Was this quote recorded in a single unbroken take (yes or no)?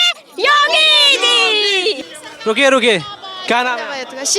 yes